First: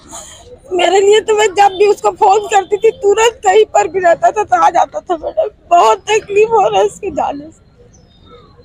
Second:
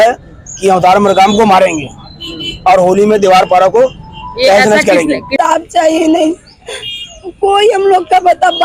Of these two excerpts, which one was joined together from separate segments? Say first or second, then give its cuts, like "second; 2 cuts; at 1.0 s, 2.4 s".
second; 1 cut; at 5.3 s